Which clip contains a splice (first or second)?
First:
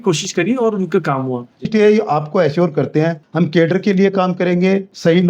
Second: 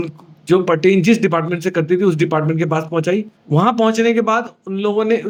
first